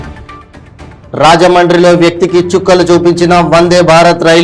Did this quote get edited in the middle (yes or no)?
no